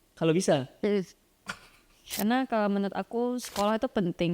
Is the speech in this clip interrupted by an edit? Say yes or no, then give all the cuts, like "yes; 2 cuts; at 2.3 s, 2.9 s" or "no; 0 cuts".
yes; 1 cut; at 2.1 s